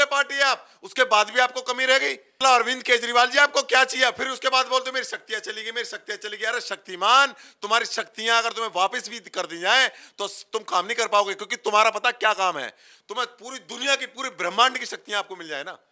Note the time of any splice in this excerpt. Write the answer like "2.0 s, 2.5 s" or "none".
2.3 s